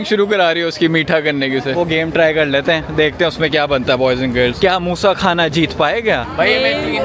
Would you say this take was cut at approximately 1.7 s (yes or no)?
yes